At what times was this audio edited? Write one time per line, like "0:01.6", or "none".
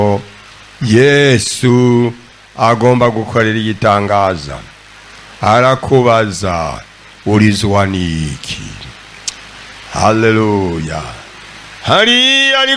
none